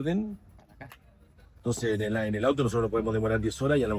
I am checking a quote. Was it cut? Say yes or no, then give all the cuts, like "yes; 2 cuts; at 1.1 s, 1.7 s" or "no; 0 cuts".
yes; 1 cut; at 1.4 s